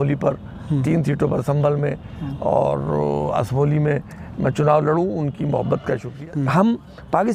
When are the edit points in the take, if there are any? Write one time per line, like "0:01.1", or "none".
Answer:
0:06.1